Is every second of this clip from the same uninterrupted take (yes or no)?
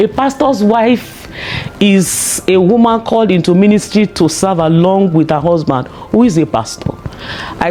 yes